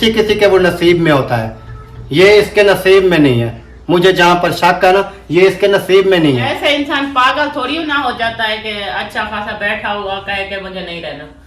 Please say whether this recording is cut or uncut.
cut